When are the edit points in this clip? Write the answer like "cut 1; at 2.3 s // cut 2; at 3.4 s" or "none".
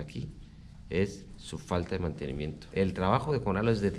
cut 1; at 2.6 s

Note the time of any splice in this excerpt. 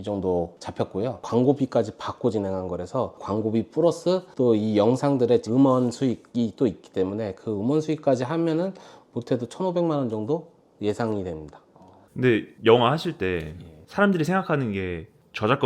none

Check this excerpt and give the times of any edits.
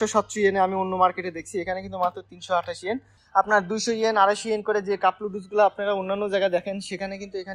cut 1; at 3.2 s

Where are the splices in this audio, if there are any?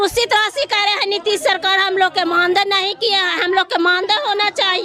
none

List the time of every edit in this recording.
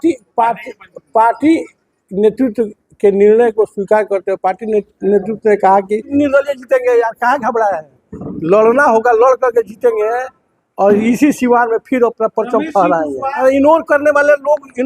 cut 1; at 6.1 s // cut 2; at 13.4 s

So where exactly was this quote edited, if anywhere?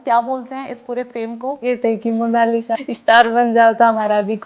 cut 1; at 1.6 s // cut 2; at 2.8 s

